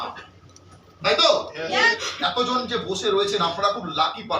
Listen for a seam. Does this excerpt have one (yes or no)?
yes